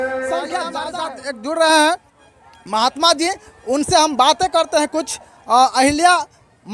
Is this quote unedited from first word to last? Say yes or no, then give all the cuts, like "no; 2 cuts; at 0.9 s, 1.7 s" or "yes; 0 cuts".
no; 1 cut; at 0.9 s